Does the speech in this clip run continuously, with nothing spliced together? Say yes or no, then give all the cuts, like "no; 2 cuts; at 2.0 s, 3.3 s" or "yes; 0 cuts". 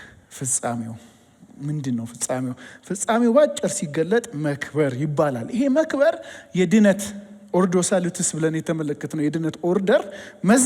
yes; 0 cuts